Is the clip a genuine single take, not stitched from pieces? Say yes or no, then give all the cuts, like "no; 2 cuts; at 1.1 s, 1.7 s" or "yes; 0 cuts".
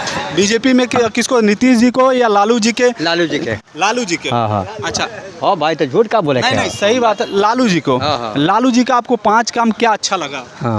yes; 0 cuts